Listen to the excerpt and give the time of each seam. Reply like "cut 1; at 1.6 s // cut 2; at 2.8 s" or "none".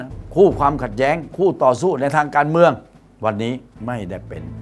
cut 1; at 3.7 s